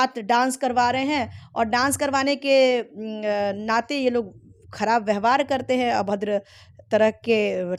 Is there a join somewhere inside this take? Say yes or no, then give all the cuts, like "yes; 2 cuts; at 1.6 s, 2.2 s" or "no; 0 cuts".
no; 0 cuts